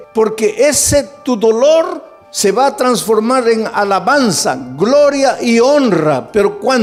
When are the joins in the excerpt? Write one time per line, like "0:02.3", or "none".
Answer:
none

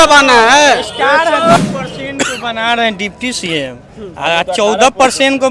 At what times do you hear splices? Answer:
0:01.6

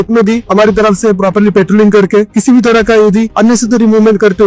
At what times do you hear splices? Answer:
0:02.3

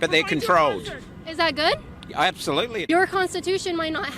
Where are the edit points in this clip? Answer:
0:02.8

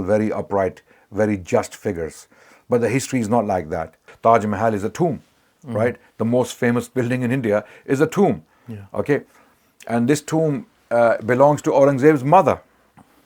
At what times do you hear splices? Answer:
0:04.0

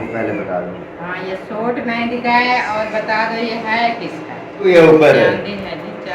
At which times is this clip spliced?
0:04.7

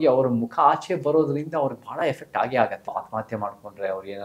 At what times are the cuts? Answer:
0:02.8

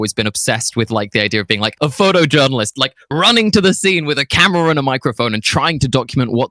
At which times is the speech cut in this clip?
none

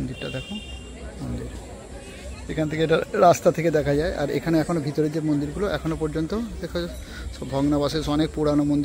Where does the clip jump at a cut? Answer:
none

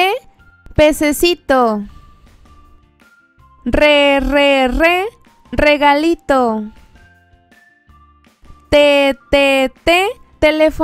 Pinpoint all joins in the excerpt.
none

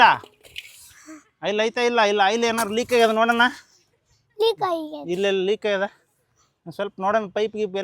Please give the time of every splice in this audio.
none

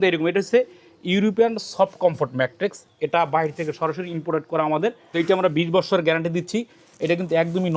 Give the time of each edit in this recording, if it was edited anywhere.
0:05.0

